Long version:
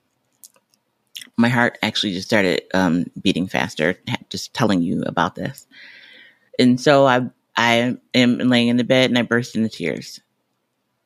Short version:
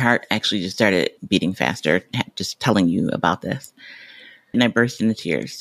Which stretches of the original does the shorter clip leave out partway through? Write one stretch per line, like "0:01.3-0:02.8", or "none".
0:02.7-0:03.1
0:06.5-0:09.1